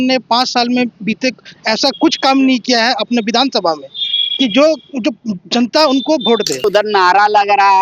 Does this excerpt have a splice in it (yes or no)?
yes